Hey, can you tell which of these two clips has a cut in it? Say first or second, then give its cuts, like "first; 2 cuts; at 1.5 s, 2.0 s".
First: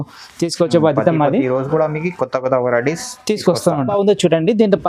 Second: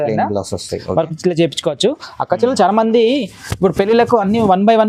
first; 1 cut; at 3.9 s